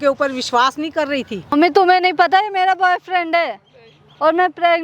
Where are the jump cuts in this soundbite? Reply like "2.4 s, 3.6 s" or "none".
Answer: 1.5 s